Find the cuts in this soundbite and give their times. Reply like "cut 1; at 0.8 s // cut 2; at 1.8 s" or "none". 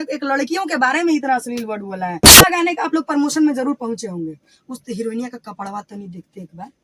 cut 1; at 2.4 s